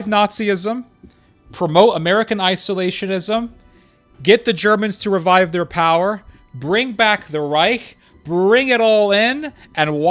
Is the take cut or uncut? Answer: uncut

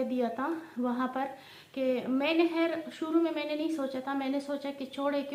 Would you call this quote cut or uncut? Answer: uncut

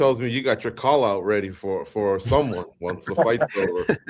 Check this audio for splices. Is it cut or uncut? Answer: uncut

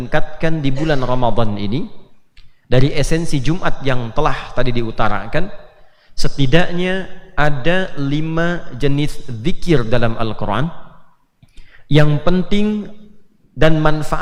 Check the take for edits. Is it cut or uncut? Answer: uncut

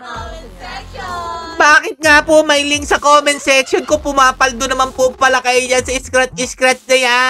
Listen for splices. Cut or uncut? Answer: uncut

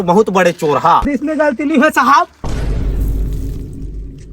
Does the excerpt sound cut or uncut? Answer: cut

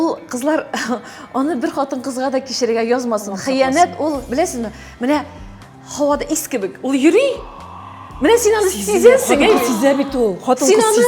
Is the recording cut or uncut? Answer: uncut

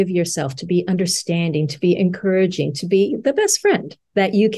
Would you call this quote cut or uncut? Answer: uncut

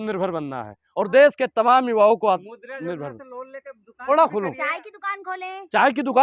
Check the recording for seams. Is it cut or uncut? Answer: cut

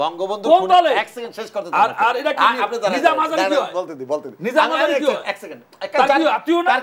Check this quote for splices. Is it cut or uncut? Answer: uncut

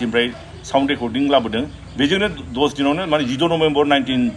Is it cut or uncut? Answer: uncut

